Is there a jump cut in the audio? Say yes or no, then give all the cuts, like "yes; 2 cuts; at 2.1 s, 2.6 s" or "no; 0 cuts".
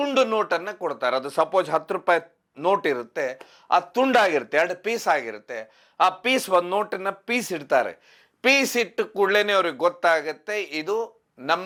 no; 0 cuts